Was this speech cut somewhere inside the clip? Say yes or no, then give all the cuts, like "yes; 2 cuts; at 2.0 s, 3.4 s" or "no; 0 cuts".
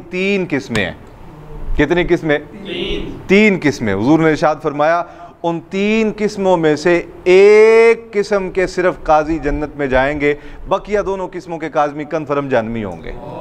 no; 0 cuts